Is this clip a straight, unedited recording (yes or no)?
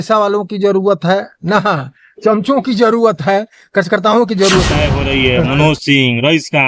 no